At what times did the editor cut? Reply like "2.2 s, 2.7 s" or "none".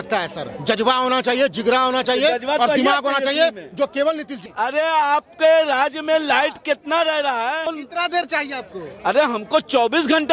4.4 s, 7.7 s